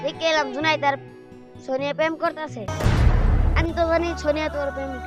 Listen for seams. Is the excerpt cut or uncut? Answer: uncut